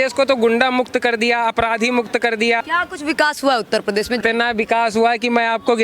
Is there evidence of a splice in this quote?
yes; 2 cuts; at 2.6 s, 4.2 s

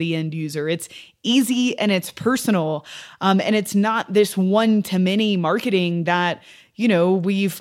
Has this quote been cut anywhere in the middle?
no; 0 cuts

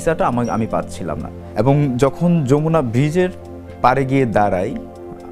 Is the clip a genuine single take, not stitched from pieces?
no; 1 cut; at 1.5 s

